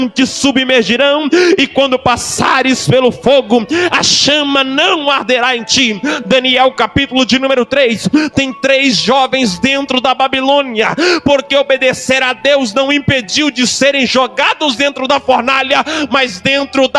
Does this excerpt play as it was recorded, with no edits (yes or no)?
yes